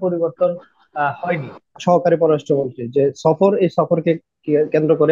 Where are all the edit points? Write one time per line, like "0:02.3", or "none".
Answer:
0:01.8